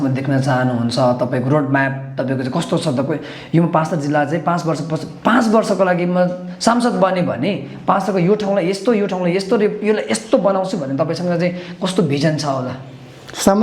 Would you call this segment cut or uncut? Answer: uncut